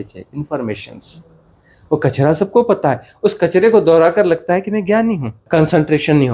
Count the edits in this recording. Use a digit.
1